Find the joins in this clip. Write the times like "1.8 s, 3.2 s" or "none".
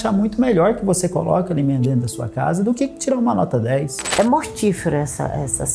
4.0 s